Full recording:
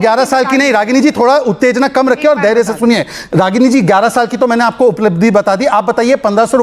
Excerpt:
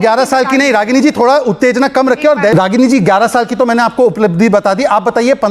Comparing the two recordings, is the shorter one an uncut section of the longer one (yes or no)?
no